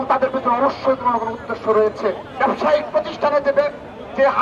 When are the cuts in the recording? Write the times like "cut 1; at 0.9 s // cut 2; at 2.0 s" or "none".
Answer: cut 1; at 2.3 s